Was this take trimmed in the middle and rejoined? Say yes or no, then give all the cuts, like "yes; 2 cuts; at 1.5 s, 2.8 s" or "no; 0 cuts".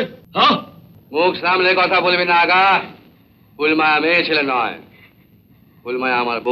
no; 0 cuts